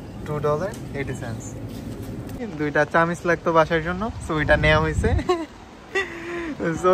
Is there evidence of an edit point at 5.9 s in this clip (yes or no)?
no